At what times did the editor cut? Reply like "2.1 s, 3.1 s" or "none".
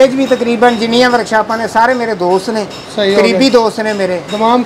none